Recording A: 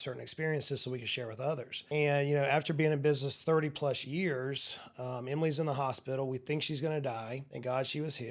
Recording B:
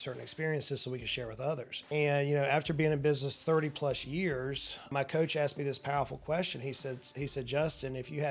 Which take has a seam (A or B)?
B